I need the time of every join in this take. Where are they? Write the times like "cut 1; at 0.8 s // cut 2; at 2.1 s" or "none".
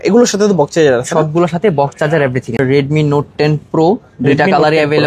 cut 1; at 2.6 s